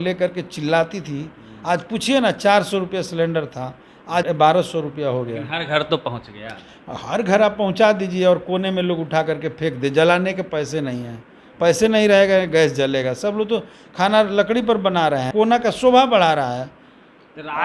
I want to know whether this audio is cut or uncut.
cut